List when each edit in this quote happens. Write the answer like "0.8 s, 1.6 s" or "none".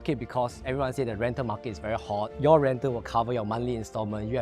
2.3 s